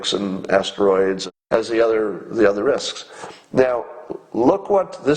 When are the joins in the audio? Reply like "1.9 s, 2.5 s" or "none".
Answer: 1.3 s